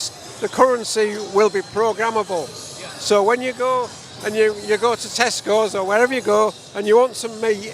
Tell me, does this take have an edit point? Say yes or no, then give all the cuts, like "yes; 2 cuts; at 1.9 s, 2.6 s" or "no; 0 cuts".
no; 0 cuts